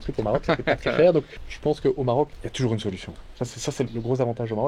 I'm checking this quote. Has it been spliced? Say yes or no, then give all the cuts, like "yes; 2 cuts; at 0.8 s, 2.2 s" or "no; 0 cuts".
yes; 3 cuts; at 1.3 s, 2.4 s, 3.9 s